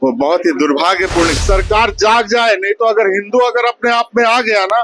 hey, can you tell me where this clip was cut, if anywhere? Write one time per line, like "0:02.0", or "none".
0:01.3